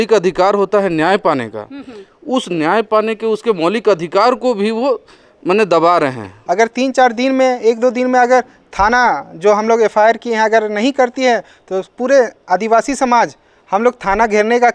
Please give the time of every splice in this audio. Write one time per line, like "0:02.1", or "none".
0:06.3